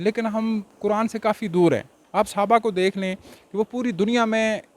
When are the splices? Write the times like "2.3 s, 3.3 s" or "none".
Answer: 2.0 s